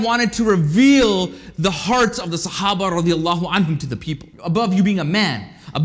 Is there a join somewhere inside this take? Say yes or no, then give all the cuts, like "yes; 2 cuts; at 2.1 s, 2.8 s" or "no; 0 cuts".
yes; 1 cut; at 4.3 s